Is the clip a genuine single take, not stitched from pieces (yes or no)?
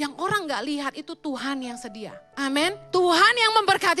no